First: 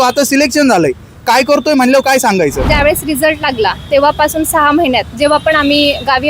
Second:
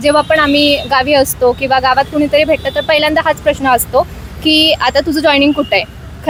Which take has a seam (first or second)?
first